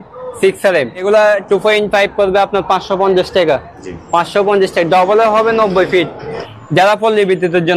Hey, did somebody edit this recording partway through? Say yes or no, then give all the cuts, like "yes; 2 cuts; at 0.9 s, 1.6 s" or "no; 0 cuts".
yes; 2 cuts; at 1.0 s, 6.4 s